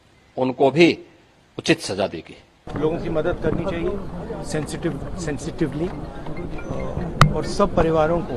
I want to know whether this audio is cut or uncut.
cut